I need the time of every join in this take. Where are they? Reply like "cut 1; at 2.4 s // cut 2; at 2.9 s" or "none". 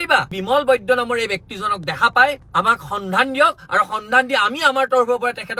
none